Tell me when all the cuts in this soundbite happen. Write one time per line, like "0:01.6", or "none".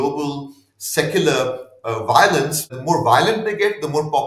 0:02.7